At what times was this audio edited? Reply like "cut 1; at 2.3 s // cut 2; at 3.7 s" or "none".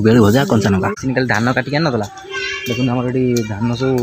cut 1; at 0.9 s